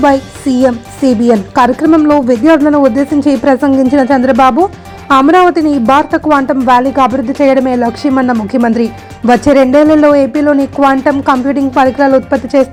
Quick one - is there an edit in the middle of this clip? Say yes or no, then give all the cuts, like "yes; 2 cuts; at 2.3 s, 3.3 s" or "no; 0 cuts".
no; 0 cuts